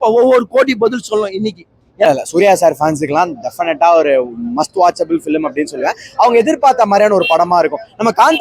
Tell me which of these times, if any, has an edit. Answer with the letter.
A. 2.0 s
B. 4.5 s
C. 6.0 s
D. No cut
A